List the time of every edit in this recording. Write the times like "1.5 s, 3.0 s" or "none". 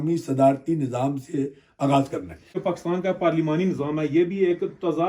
2.6 s